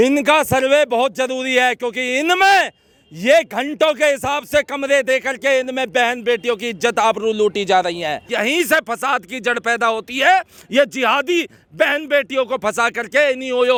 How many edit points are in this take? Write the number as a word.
zero